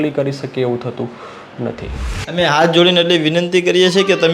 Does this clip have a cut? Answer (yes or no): yes